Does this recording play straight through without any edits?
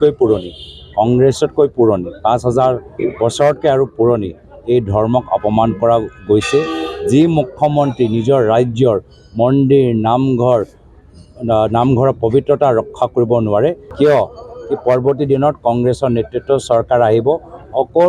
no; 1 cut; at 13.8 s

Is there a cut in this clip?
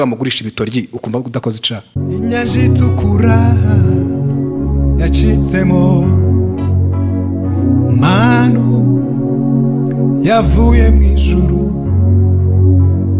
yes; 1 cut; at 1.9 s

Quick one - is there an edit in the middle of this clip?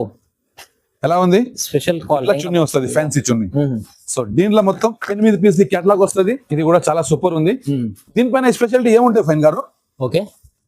yes; 1 cut; at 6.5 s

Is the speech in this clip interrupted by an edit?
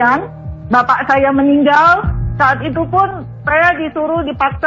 yes; 1 cut; at 2.2 s

